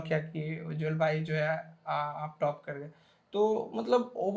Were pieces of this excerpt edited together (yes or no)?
no